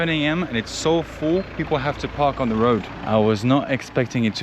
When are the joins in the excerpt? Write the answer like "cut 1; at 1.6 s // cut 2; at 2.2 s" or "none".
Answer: cut 1; at 2.9 s